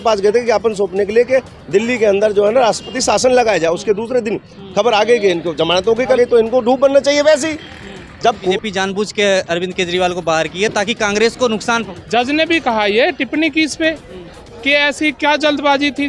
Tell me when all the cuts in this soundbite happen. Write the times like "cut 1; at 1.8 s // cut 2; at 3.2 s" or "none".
cut 1; at 6.2 s // cut 2; at 8.5 s // cut 3; at 11.9 s